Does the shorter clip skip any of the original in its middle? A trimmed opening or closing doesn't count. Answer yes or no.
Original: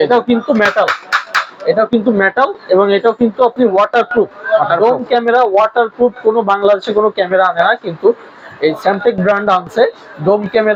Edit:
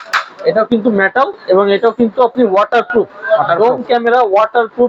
no